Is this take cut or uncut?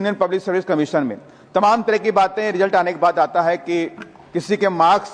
uncut